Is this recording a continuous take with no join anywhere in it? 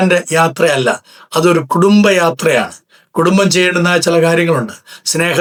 yes; 0 cuts

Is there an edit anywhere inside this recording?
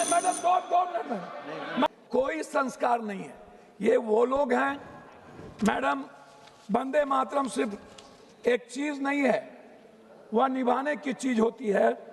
yes; 1 cut; at 1.9 s

